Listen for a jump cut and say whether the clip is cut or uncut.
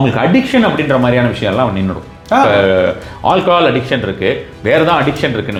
uncut